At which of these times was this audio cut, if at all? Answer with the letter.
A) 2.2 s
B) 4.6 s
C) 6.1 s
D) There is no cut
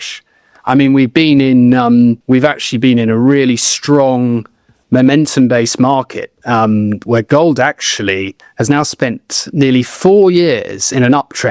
A